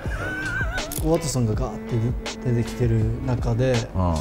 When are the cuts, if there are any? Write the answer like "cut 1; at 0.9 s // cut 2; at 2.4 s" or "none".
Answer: cut 1; at 1.0 s